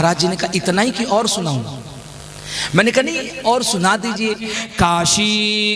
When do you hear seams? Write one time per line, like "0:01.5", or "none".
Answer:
0:04.5